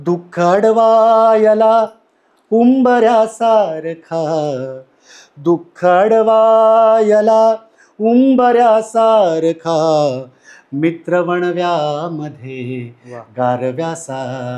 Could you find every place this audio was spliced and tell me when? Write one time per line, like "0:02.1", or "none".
none